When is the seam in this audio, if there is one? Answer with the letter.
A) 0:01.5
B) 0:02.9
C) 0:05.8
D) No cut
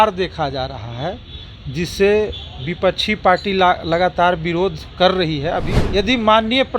C